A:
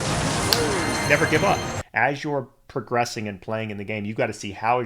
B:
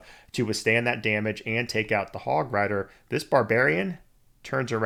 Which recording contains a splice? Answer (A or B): A